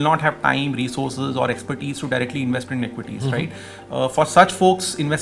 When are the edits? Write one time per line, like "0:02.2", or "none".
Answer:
none